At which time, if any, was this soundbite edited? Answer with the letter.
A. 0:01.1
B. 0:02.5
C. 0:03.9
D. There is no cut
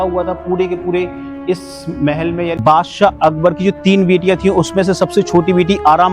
B